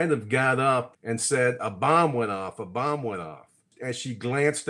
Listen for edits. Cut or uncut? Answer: cut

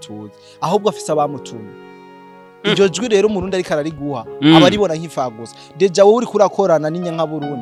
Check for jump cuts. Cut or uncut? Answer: uncut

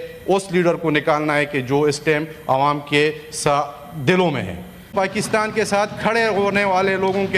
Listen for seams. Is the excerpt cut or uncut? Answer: cut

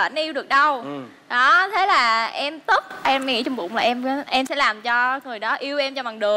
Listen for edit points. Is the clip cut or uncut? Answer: uncut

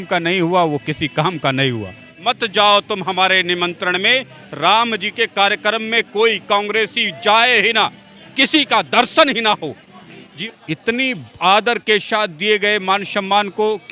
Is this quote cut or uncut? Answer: cut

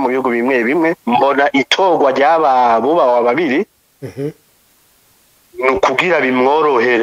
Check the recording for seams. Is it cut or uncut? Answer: cut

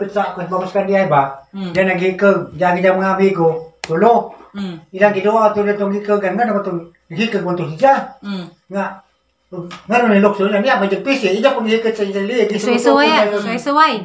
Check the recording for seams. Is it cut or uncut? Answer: cut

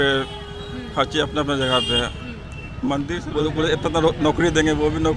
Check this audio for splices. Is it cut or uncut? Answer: cut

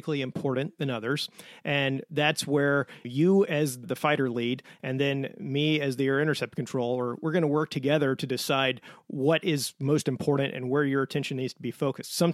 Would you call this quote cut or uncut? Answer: cut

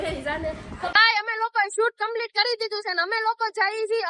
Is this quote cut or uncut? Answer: cut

